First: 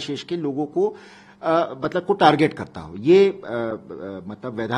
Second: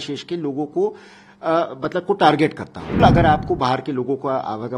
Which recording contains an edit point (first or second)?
second